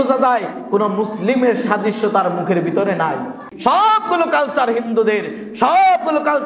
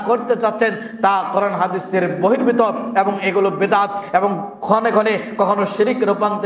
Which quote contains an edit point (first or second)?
first